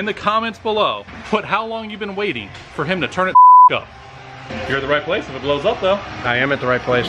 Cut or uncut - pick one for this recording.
cut